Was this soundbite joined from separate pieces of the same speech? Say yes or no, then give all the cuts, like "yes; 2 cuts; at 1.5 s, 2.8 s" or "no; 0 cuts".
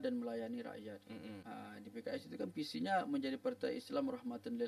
yes; 1 cut; at 1.4 s